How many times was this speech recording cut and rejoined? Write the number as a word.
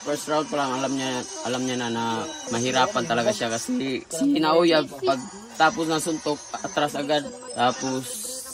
three